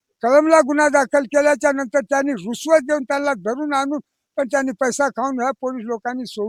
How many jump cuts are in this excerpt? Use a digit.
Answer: 0